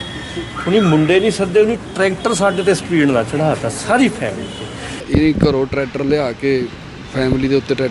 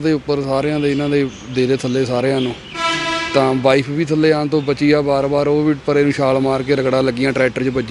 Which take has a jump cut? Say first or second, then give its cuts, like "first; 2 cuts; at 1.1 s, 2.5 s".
first; 1 cut; at 5.0 s